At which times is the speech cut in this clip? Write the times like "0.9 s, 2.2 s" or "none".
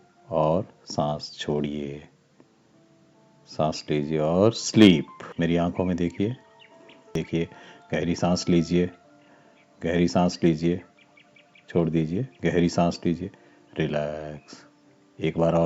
5.2 s, 7.1 s